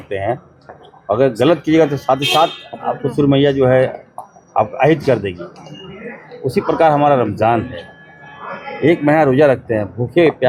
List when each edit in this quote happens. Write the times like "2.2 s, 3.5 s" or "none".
none